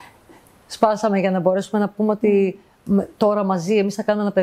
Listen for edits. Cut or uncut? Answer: uncut